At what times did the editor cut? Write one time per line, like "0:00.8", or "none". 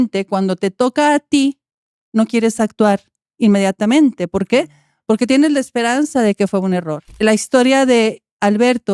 0:07.1

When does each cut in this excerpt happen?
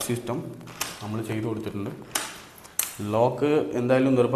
none

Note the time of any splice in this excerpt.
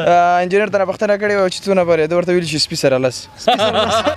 none

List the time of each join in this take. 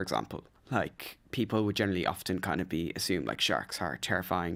none

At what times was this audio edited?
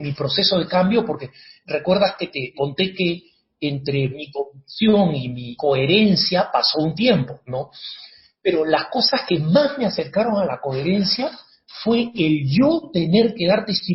0:02.5
0:05.4

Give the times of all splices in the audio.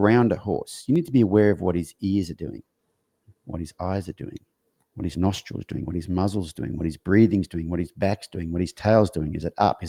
none

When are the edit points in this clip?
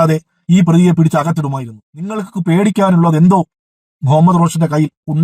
0:02.2

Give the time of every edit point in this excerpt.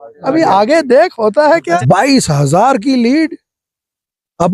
0:01.8

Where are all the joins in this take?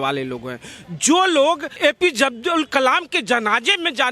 0:01.7

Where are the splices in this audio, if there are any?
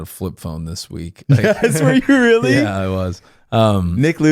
none

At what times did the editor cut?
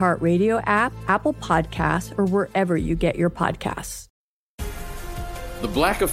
0:04.0

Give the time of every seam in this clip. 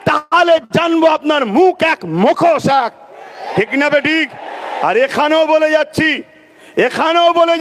none

